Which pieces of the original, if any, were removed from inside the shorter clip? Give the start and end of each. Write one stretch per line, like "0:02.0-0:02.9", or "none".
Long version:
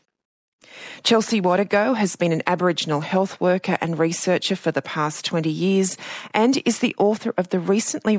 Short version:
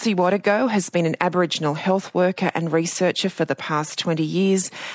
none